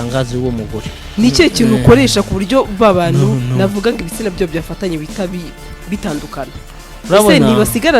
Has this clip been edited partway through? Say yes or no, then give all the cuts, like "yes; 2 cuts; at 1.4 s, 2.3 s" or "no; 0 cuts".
yes; 1 cut; at 1.0 s